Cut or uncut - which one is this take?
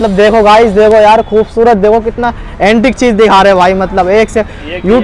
uncut